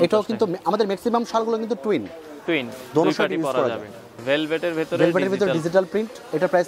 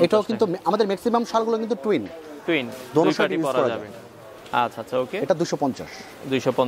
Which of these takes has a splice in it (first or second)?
first